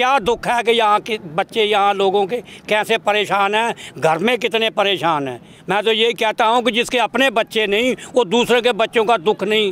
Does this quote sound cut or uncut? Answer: uncut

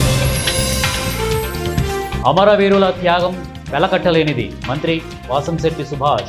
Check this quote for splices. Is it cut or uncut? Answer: uncut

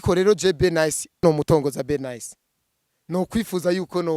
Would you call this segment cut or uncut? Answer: cut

